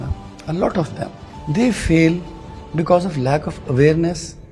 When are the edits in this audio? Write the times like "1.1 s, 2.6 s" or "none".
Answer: 1.3 s